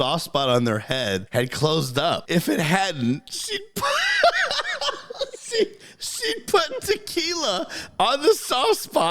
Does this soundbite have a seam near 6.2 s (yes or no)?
no